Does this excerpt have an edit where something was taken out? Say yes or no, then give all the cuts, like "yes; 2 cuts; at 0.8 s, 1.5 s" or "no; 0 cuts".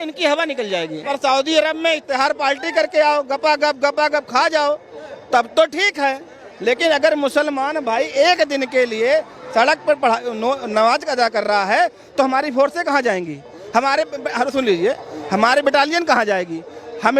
yes; 1 cut; at 1.1 s